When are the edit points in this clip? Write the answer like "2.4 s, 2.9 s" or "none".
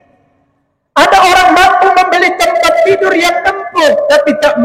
none